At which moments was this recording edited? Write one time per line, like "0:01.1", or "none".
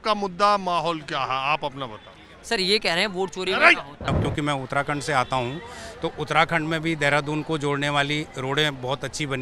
0:04.1